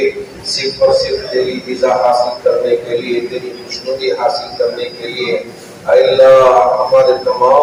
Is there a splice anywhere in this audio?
no; 0 cuts

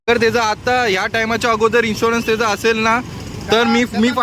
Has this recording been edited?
no; 0 cuts

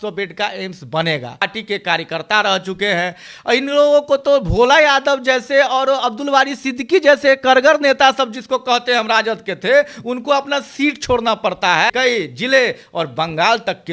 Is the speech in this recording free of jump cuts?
no; 2 cuts; at 1.5 s, 11.9 s

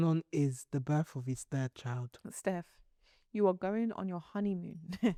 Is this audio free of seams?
yes; 0 cuts

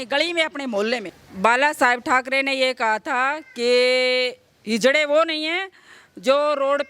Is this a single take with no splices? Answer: no; 1 cut; at 1.2 s

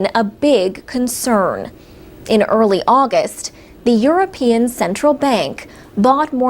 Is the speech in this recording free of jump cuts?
no; 1 cut; at 3.0 s

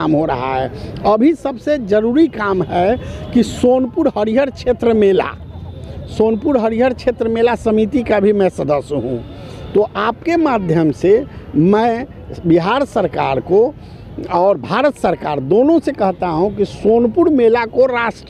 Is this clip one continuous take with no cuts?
yes; 0 cuts

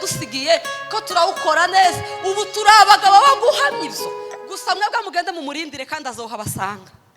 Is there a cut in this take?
yes; 1 cut; at 4.4 s

